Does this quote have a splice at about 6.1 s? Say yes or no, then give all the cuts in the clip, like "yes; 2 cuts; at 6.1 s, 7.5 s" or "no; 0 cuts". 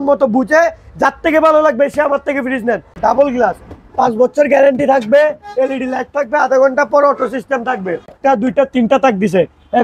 no; 2 cuts; at 2.9 s, 8.1 s